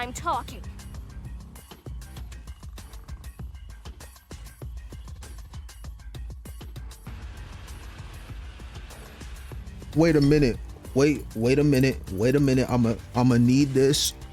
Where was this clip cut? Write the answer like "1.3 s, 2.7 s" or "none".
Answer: 9.9 s